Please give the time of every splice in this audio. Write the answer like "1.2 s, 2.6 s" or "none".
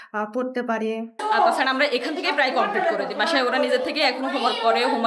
1.2 s